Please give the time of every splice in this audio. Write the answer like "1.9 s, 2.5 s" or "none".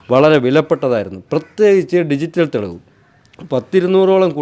none